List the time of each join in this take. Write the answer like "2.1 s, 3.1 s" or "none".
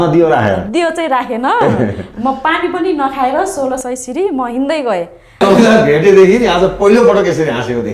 5.2 s